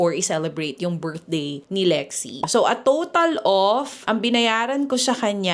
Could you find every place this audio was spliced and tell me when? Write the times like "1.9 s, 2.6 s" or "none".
1.6 s, 2.4 s